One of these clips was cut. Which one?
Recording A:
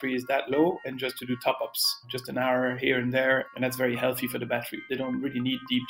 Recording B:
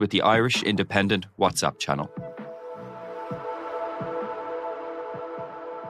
A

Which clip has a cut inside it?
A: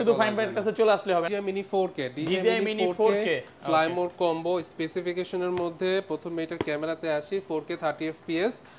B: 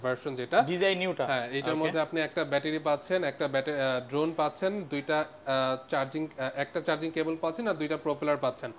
A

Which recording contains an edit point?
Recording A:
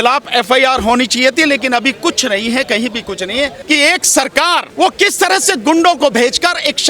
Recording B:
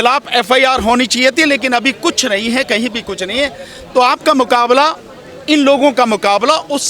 A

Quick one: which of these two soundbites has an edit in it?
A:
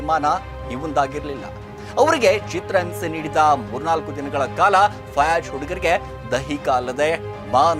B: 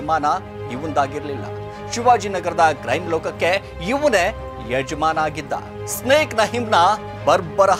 A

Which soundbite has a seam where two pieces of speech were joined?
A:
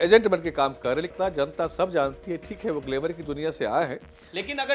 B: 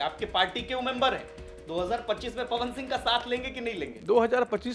A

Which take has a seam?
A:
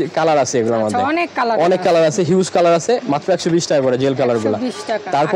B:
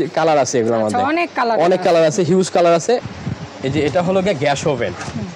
B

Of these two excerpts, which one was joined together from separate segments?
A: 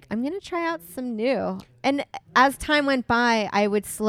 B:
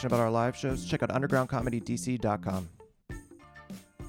B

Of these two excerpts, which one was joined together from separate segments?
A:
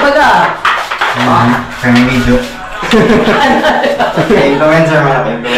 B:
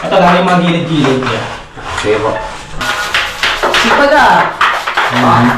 B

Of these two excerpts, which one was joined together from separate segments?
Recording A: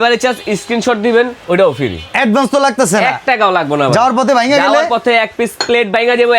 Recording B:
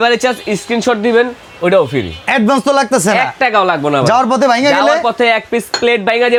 A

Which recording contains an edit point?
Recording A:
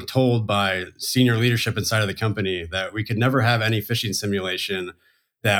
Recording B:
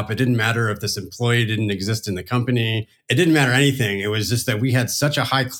B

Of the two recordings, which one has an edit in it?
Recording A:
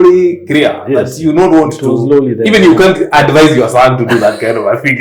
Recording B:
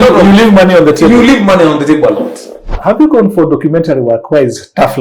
B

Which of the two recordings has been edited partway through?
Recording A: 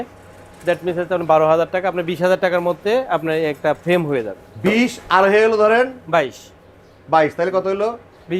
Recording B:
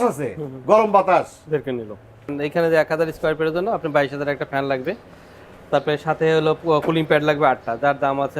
B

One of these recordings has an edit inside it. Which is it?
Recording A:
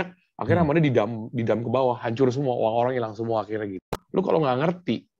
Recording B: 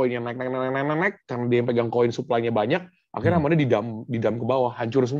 A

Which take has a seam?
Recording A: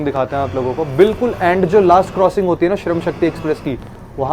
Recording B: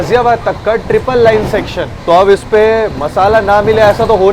B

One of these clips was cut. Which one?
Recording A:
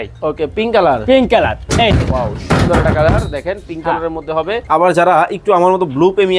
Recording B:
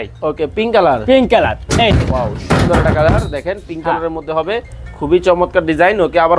A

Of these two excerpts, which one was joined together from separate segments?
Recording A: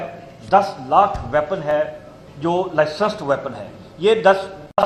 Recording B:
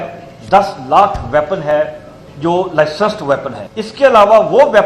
B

